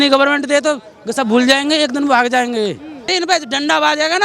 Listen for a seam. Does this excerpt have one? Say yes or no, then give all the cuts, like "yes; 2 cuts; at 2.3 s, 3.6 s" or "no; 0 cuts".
yes; 1 cut; at 3.1 s